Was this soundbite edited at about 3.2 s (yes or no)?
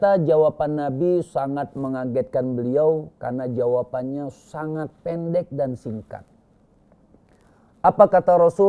no